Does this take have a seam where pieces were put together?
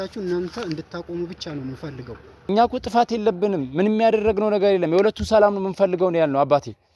yes; 1 cut; at 2.4 s

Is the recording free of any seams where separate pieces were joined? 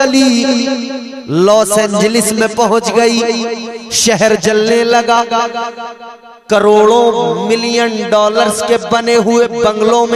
yes; 0 cuts

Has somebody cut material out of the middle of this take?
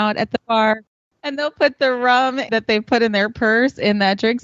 yes; 2 cuts; at 0.9 s, 2.5 s

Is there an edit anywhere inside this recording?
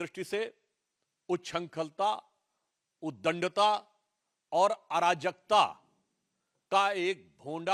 no; 0 cuts

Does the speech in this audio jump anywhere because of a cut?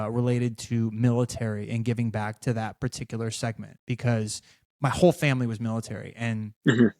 no; 0 cuts

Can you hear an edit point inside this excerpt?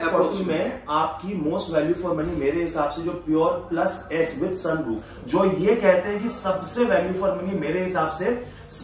yes; 1 cut; at 5.1 s

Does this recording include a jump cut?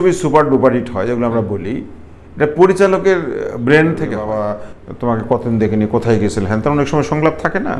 yes; 1 cut; at 4.2 s

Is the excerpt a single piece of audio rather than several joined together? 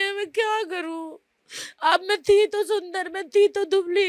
yes; 0 cuts

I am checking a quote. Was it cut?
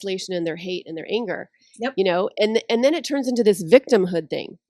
no; 0 cuts

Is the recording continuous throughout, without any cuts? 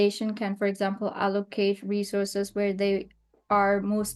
yes; 0 cuts

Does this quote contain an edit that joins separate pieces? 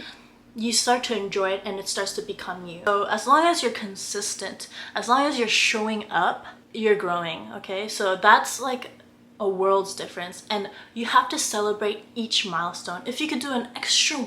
yes; 1 cut; at 2.9 s

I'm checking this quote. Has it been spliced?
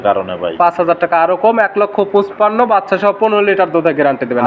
no; 0 cuts

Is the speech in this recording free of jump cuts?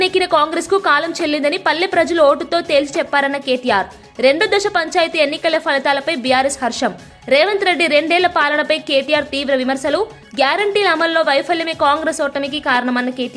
yes; 0 cuts

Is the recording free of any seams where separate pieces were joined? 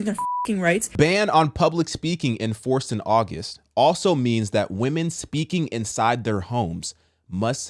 no; 1 cut; at 0.9 s

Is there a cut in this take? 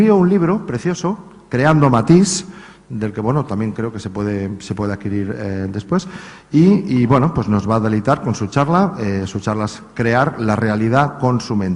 yes; 1 cut; at 1.7 s

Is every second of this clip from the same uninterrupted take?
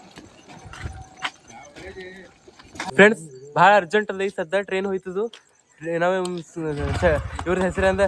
yes; 0 cuts

